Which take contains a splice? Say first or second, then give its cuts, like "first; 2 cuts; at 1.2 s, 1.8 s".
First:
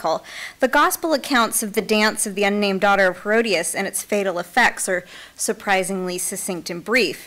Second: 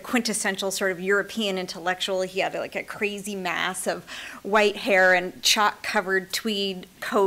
first; 1 cut; at 1.6 s